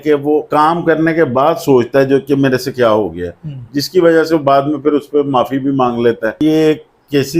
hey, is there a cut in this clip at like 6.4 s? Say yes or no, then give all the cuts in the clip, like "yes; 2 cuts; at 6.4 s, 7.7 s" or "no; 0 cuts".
yes; 1 cut; at 6.4 s